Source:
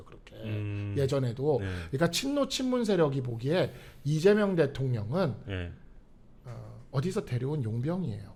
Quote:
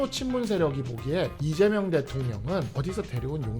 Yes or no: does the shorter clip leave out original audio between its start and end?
yes